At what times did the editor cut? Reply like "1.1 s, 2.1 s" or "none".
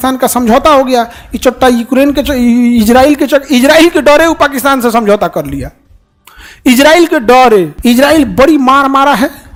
none

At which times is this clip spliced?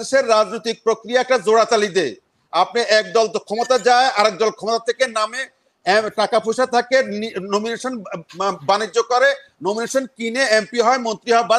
none

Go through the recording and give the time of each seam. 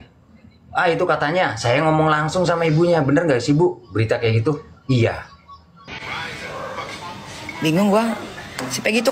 5.2 s

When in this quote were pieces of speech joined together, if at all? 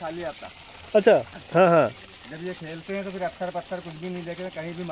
0.9 s

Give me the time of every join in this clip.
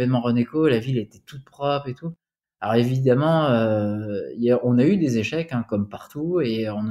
2.4 s

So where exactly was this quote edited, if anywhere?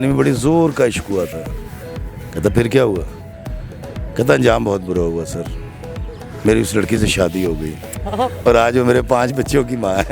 none

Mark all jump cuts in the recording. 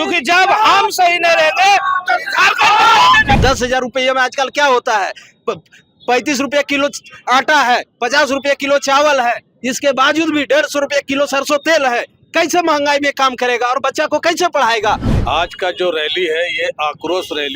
3.4 s, 15.1 s

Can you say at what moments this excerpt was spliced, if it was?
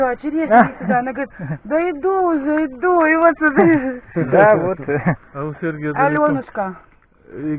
none

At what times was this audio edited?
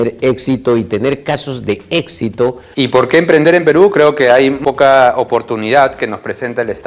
2.6 s, 4.6 s

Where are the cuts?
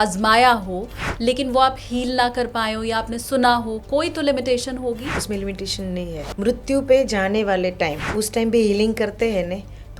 5.2 s, 6.3 s, 8.0 s

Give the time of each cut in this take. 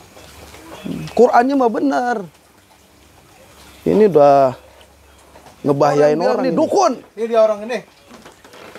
6.4 s

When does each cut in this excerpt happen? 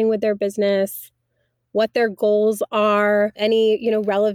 3.4 s

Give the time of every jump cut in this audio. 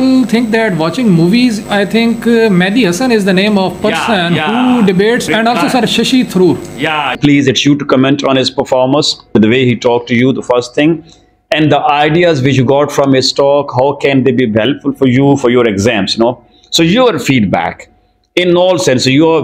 1.6 s, 5.2 s, 7.2 s, 9.3 s

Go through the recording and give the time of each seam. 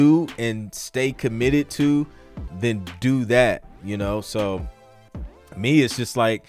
2.5 s

